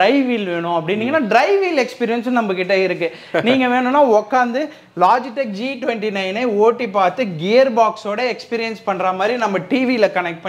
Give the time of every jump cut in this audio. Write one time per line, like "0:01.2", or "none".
none